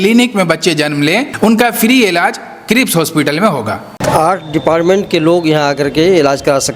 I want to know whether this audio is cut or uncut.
cut